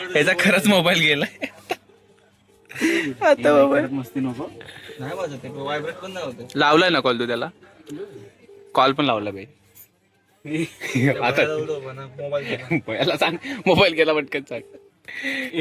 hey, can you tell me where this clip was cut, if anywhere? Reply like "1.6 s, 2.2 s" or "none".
none